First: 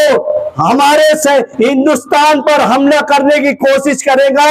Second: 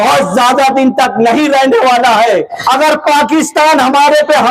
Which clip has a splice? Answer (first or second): second